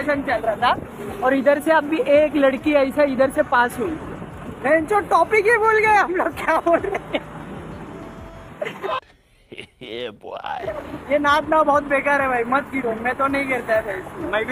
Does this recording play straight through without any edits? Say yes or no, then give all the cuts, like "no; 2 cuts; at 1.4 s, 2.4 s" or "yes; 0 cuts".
yes; 0 cuts